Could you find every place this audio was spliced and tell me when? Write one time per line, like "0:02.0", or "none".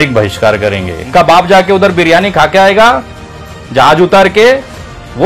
0:01.0